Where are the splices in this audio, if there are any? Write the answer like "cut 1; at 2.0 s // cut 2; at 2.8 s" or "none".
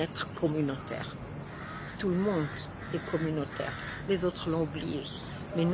none